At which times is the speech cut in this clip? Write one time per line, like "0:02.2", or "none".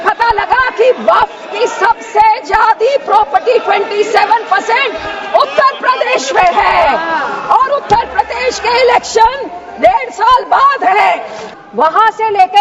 0:11.5